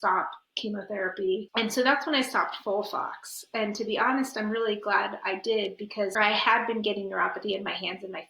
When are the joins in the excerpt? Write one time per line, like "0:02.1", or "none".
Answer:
0:01.4
0:06.1